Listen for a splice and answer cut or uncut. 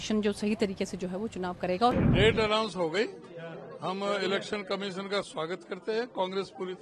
cut